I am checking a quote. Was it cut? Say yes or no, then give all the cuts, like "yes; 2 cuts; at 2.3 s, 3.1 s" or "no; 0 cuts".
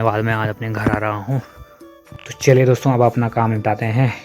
yes; 1 cut; at 2.0 s